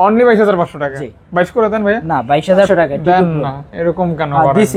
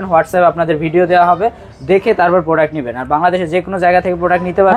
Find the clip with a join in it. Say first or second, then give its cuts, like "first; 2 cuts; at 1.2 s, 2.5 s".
first; 1 cut; at 2.7 s